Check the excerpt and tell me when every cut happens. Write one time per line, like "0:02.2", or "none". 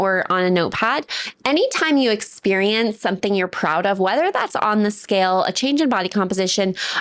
none